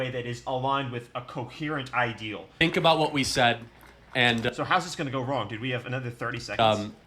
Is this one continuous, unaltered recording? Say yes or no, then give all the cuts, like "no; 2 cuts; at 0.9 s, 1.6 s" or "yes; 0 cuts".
no; 1 cut; at 2.6 s